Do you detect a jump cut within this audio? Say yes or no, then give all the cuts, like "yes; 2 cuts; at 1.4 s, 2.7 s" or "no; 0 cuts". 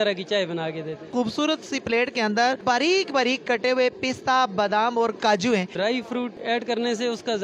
yes; 3 cuts; at 1.1 s, 2.6 s, 5.8 s